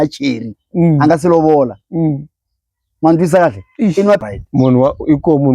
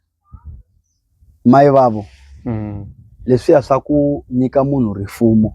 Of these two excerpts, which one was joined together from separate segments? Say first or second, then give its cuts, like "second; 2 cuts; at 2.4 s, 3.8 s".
first; 1 cut; at 4.2 s